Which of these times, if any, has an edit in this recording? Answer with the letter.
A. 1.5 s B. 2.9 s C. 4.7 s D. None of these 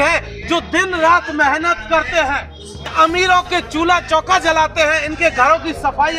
B